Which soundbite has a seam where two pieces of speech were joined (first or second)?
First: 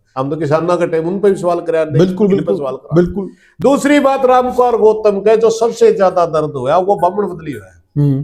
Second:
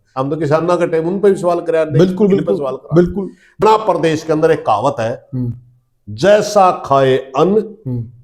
second